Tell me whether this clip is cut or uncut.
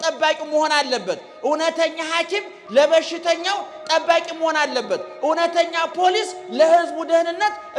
uncut